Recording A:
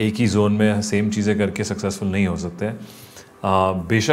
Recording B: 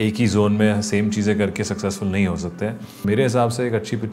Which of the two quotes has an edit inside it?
B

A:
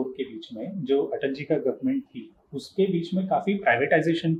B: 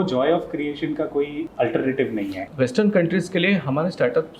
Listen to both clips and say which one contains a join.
B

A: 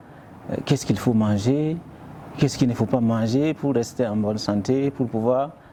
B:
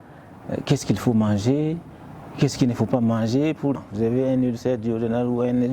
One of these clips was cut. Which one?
B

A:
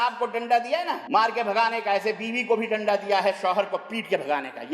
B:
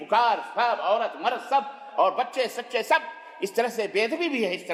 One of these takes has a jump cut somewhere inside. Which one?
A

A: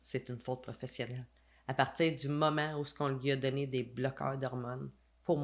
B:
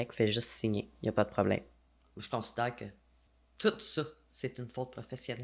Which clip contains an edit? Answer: B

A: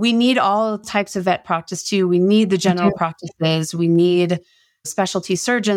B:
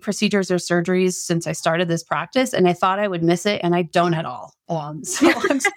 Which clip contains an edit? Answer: A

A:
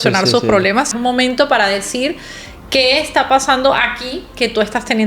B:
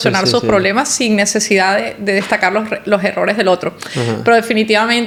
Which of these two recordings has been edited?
A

